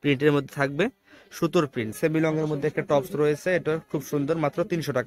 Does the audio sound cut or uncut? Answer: cut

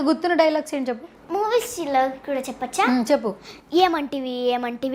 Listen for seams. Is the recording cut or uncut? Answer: uncut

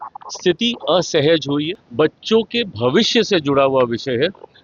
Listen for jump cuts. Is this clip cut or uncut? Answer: cut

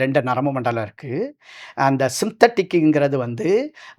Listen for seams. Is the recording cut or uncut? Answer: uncut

